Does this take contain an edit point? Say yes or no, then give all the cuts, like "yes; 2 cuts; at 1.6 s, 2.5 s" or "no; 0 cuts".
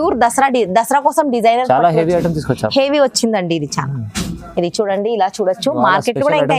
no; 0 cuts